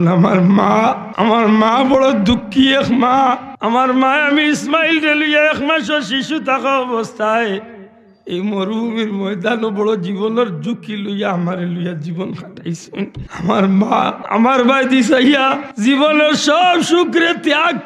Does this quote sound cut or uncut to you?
cut